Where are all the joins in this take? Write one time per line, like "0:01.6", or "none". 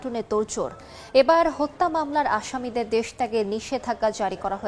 none